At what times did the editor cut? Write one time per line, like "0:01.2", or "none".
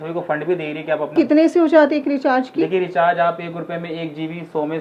0:01.1